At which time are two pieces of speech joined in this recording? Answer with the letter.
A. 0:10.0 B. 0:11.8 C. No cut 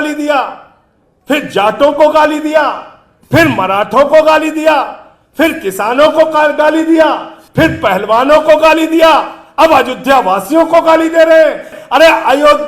B